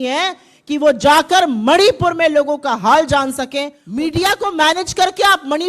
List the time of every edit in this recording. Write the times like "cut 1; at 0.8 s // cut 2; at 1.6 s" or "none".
cut 1; at 3.8 s